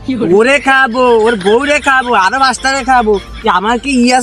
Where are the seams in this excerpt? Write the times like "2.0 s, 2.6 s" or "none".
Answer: none